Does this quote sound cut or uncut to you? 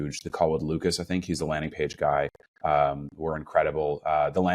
uncut